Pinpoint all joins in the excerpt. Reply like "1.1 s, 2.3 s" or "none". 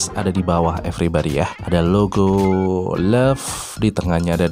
1.6 s